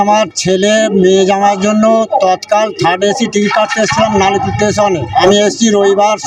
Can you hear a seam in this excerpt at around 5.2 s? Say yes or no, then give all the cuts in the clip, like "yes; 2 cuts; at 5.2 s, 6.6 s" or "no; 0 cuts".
yes; 1 cut; at 5.2 s